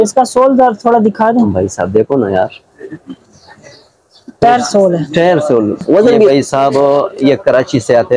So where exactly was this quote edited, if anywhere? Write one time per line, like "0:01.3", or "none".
0:06.3